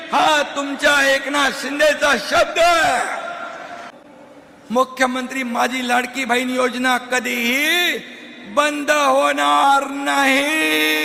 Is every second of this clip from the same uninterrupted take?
yes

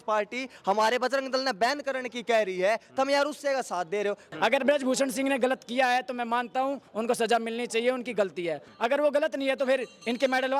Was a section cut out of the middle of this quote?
yes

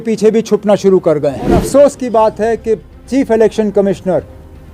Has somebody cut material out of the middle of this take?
yes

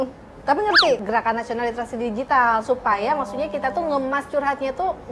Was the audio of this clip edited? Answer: yes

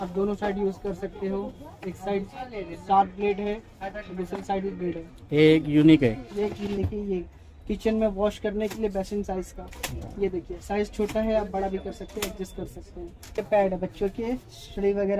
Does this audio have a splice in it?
yes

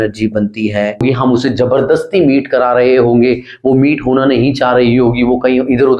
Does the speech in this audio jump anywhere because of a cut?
yes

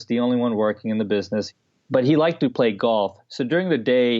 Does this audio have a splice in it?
yes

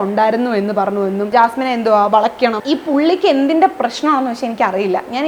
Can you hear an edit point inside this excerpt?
yes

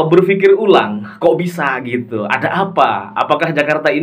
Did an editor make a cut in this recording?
no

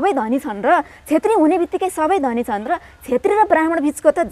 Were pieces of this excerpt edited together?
no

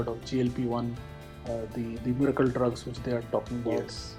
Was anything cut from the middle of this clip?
no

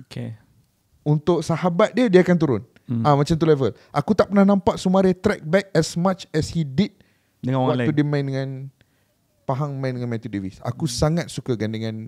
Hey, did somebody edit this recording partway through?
no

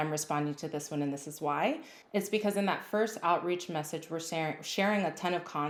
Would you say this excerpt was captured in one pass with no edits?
yes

